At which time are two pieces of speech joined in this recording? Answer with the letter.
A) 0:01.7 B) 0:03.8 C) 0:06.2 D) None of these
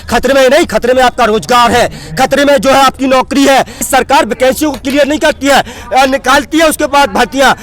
B